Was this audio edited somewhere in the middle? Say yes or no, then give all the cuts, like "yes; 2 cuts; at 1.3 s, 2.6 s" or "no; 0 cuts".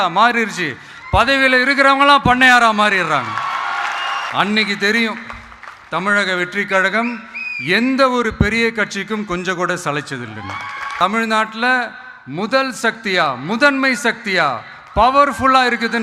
yes; 2 cuts; at 4.3 s, 10.9 s